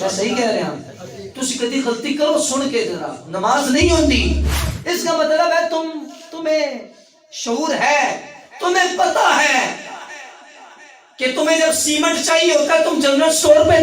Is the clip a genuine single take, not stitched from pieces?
no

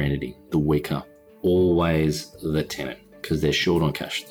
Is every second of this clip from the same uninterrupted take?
no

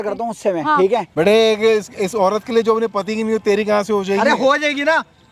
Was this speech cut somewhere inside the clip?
yes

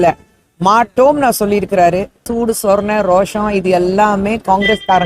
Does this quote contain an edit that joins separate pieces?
yes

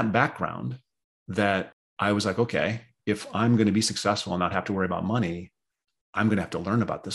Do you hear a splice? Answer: yes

